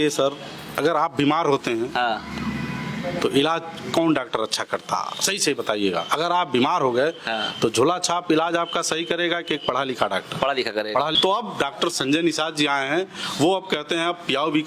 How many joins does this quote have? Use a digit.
1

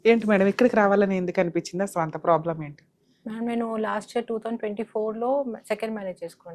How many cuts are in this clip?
0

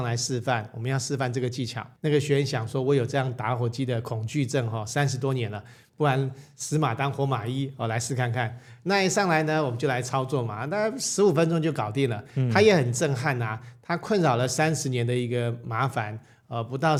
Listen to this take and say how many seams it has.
0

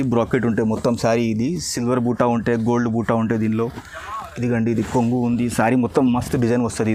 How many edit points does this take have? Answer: 0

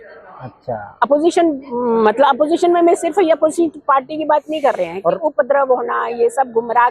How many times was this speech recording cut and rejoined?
0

